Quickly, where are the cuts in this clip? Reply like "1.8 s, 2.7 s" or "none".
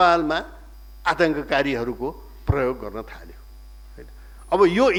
none